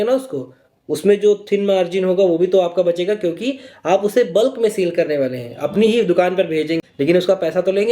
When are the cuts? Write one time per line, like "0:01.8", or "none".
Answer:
0:06.8